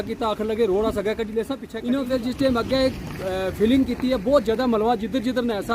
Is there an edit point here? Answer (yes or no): yes